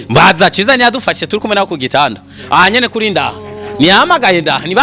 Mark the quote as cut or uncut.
uncut